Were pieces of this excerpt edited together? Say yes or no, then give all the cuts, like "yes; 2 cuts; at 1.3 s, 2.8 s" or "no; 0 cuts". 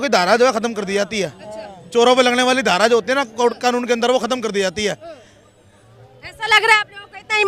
no; 0 cuts